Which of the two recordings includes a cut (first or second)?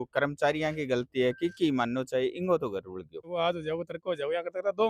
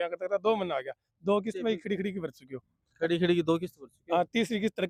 first